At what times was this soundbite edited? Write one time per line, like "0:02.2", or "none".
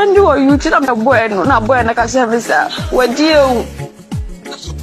0:00.9